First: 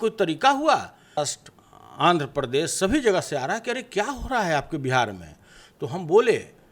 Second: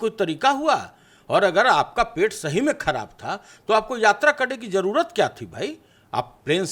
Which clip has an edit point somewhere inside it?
first; 1 cut; at 1.2 s

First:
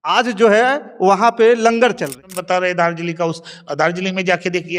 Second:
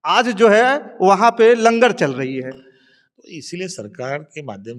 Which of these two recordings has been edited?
first; 1 cut; at 2.2 s

